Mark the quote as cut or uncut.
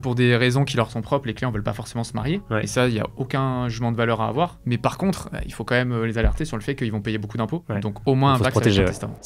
uncut